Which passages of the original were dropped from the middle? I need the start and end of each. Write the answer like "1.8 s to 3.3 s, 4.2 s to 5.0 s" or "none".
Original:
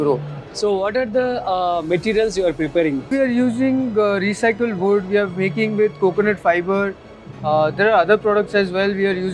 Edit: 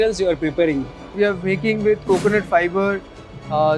3.2 s to 5.0 s